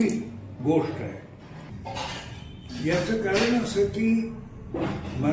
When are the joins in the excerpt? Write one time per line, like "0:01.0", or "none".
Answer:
0:01.7